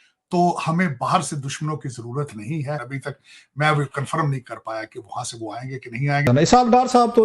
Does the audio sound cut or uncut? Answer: cut